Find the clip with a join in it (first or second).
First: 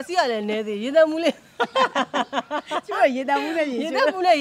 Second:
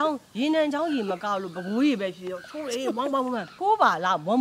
second